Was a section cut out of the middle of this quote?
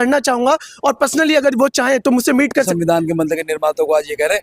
yes; 1 cut; at 2.7 s

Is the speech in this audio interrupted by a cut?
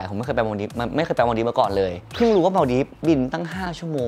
no; 0 cuts

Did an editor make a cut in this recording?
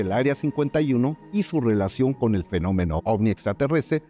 no; 0 cuts

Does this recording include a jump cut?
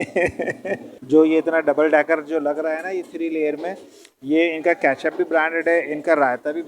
yes; 1 cut; at 0.9 s

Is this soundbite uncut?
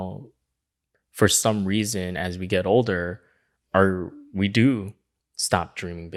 yes; 0 cuts

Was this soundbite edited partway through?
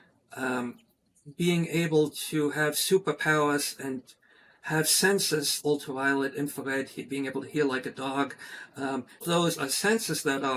yes; 2 cuts; at 5.6 s, 9.2 s

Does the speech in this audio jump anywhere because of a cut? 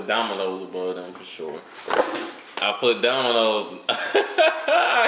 no; 0 cuts

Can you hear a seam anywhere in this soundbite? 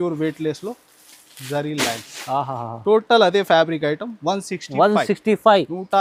no; 0 cuts

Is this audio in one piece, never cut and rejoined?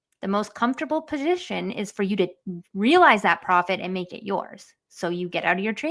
yes; 0 cuts

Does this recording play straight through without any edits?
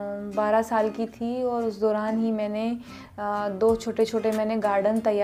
yes; 0 cuts

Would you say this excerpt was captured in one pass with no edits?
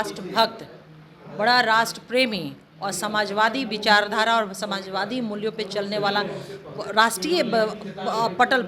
yes; 0 cuts

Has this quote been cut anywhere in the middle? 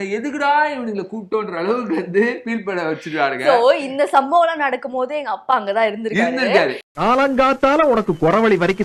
no; 0 cuts

